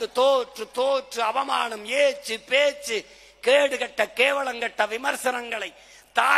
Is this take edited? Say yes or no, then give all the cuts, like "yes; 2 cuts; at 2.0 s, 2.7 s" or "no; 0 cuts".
no; 0 cuts